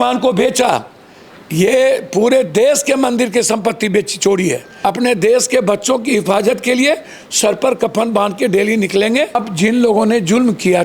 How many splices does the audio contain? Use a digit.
2